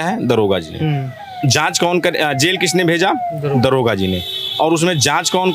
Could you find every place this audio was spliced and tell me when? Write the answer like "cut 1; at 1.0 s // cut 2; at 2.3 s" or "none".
none